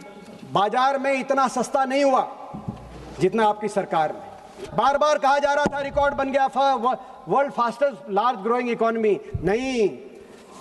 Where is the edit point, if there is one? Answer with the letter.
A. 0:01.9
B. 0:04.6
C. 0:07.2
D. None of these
B